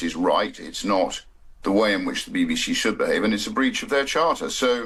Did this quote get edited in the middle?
no; 0 cuts

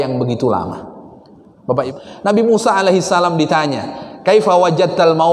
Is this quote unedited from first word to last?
no; 1 cut; at 1.9 s

